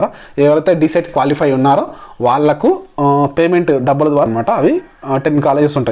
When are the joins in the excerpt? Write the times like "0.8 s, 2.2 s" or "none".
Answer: 4.3 s